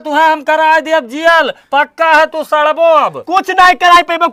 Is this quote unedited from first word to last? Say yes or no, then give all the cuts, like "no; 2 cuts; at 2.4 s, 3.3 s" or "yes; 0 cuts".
yes; 0 cuts